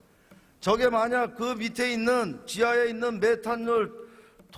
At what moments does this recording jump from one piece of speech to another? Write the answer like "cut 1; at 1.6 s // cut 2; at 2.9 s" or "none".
none